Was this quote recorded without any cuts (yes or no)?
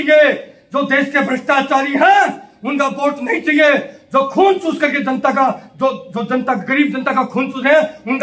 yes